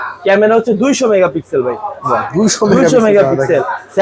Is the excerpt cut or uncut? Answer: uncut